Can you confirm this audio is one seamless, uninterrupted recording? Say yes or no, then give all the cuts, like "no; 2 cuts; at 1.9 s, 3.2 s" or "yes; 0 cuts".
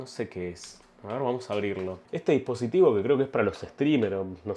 no; 1 cut; at 2.0 s